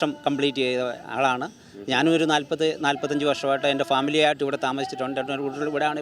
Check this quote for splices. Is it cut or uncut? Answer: uncut